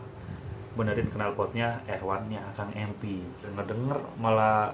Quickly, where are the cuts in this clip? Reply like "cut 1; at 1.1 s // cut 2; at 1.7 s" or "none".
cut 1; at 3.5 s

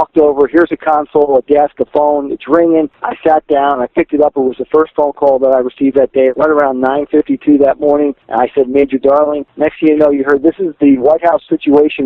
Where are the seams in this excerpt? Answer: cut 1; at 3.0 s // cut 2; at 6.3 s // cut 3; at 8.2 s // cut 4; at 9.4 s

